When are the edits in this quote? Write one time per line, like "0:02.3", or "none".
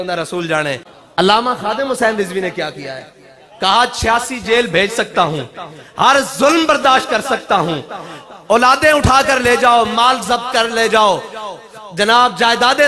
0:00.9